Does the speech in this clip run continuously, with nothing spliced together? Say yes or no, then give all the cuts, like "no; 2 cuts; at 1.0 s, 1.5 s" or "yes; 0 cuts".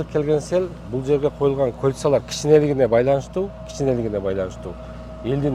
yes; 0 cuts